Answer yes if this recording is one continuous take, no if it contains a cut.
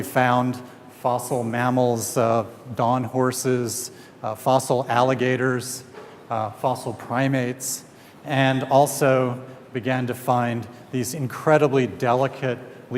yes